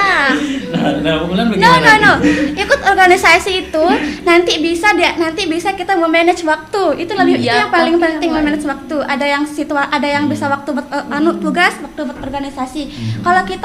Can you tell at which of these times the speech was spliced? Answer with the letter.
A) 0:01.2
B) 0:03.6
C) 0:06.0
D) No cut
D